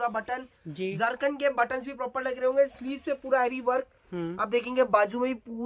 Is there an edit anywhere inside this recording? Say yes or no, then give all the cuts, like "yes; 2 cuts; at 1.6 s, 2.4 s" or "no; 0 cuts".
no; 0 cuts